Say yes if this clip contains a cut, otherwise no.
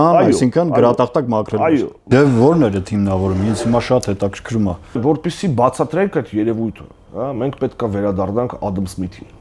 yes